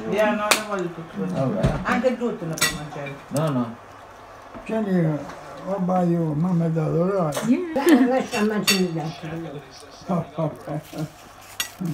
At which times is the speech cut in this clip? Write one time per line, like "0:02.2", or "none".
0:07.7